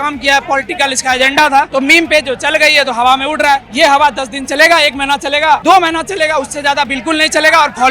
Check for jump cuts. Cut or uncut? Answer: cut